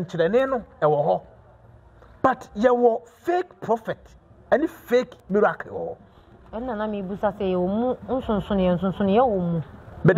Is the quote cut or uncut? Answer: uncut